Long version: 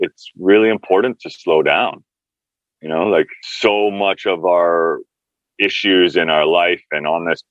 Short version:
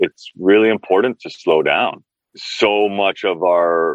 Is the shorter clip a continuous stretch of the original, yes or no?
no